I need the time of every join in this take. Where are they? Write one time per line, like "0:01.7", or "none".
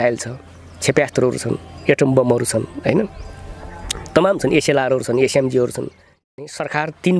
0:06.1